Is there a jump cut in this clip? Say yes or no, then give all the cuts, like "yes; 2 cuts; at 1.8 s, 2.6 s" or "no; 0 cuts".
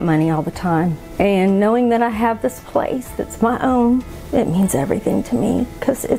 yes; 2 cuts; at 1.0 s, 4.2 s